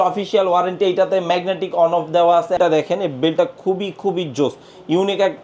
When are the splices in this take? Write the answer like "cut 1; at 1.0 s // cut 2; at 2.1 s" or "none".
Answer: cut 1; at 2.6 s